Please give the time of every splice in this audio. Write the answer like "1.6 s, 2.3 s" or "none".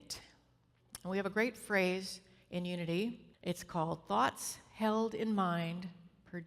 3.3 s